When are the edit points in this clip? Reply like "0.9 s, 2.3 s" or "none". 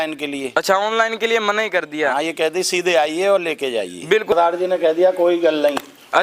4.3 s

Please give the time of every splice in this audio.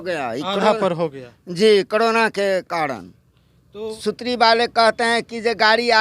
3.9 s

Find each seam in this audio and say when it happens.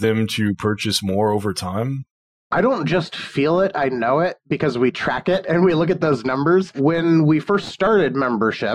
5.5 s, 6.8 s

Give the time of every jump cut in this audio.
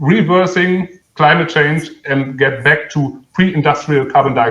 1.0 s

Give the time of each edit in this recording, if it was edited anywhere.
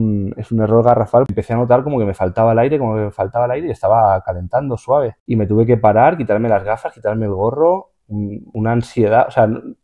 1.3 s, 5.2 s, 8.4 s

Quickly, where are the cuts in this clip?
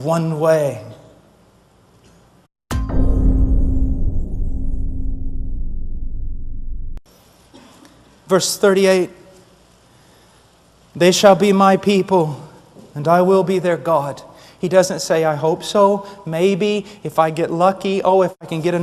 none

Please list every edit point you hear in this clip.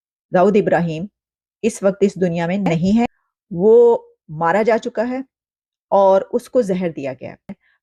none

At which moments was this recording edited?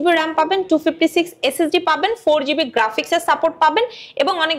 none

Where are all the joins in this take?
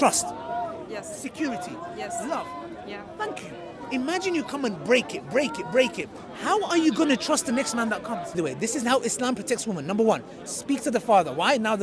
8.4 s

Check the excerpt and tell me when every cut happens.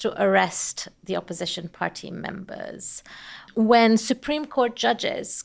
3.5 s

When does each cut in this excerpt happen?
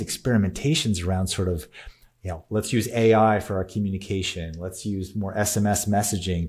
none

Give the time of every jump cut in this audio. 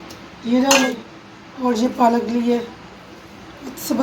0.9 s

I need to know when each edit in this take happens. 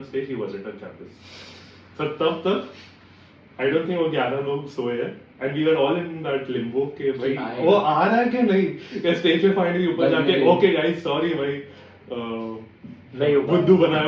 none

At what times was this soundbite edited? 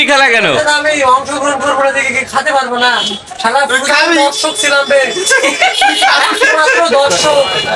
none

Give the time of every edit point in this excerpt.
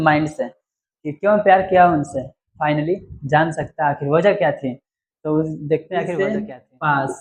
6.1 s

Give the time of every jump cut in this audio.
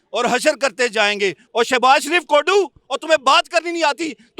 1.4 s

